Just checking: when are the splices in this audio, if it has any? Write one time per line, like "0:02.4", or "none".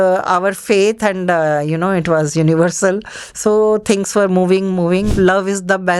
0:05.1